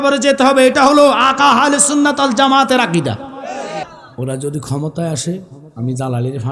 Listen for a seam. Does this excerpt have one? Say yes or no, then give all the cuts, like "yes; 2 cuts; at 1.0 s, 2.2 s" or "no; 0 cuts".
yes; 1 cut; at 3.9 s